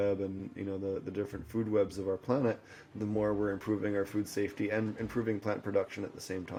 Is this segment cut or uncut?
uncut